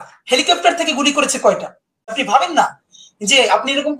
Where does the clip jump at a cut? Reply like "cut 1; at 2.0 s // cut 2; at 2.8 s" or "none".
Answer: cut 1; at 2.2 s